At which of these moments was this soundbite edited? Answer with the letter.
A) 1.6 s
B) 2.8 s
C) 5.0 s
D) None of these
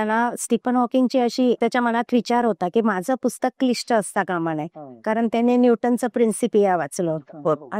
A